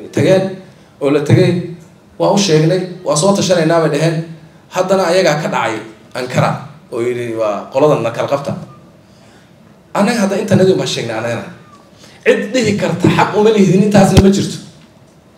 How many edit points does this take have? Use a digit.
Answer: 0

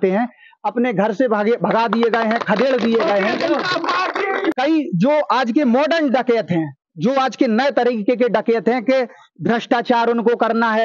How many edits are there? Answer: 1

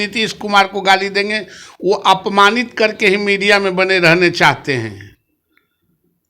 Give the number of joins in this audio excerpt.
0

